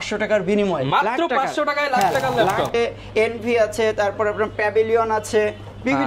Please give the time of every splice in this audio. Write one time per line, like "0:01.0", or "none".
0:02.7